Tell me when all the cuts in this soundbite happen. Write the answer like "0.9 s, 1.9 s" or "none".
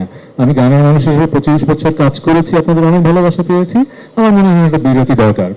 none